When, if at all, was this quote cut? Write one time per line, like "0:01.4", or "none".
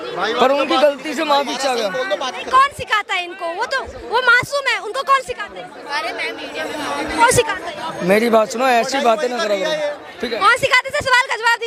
none